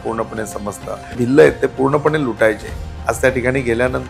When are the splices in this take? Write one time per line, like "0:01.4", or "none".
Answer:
0:01.2